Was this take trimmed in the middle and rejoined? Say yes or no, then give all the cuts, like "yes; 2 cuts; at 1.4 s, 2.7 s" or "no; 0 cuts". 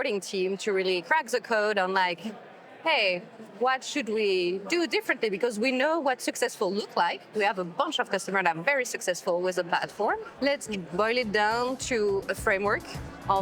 yes; 1 cut; at 1.0 s